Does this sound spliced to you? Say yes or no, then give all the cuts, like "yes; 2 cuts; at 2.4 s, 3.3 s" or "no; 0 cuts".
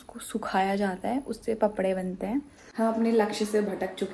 yes; 1 cut; at 2.6 s